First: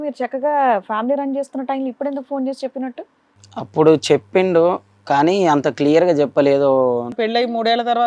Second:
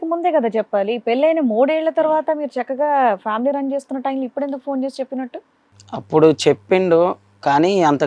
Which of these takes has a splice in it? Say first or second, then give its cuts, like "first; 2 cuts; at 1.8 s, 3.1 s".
first; 1 cut; at 7.2 s